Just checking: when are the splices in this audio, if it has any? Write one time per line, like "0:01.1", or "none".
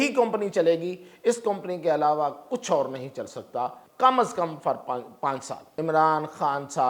0:03.8
0:05.6